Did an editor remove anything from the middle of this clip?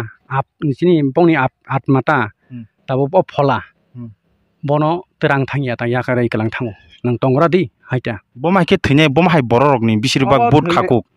no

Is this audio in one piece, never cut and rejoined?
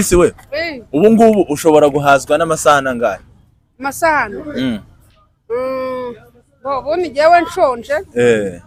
yes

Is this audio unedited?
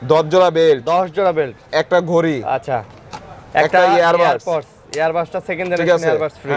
yes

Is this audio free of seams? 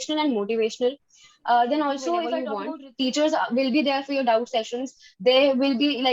no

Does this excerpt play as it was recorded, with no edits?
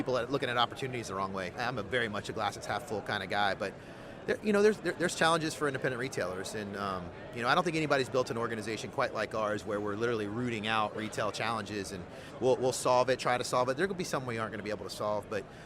no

